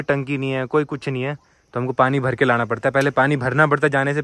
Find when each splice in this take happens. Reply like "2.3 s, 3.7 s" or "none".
none